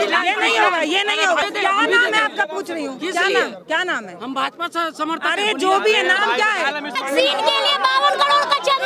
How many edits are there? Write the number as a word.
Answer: two